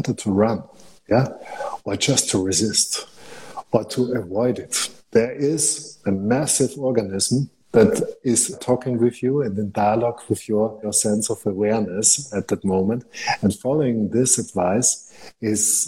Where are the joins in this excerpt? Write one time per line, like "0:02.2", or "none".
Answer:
none